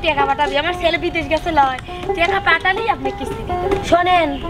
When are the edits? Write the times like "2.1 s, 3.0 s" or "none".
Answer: none